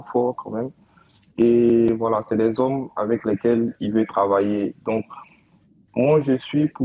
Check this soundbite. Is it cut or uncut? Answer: uncut